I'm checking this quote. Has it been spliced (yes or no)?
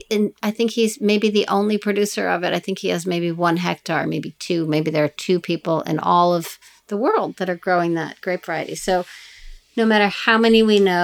no